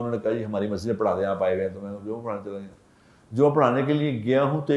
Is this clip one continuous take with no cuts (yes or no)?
yes